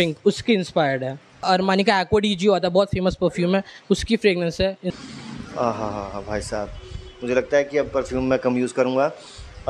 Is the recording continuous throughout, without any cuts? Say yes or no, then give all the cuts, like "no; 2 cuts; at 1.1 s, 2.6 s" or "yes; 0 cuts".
no; 2 cuts; at 1.4 s, 5.0 s